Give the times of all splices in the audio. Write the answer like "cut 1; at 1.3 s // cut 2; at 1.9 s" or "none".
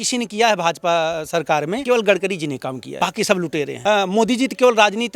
cut 1; at 1.8 s // cut 2; at 2.8 s // cut 3; at 3.7 s